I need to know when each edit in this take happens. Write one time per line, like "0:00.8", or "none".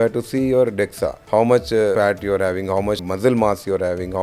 0:01.1
0:01.9
0:03.1